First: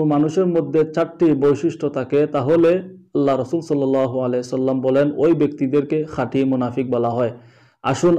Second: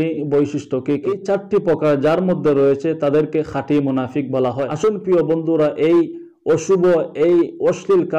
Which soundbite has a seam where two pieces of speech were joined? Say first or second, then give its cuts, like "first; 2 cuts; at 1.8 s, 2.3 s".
second; 2 cuts; at 1.1 s, 4.7 s